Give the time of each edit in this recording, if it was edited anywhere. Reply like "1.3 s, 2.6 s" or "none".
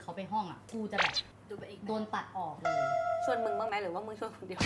3.7 s